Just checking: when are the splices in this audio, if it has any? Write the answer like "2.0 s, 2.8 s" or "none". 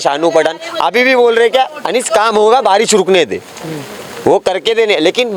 none